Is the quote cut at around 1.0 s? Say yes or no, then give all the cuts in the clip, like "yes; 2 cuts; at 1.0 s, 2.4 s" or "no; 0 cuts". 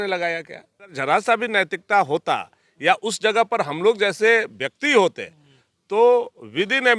yes; 1 cut; at 1.0 s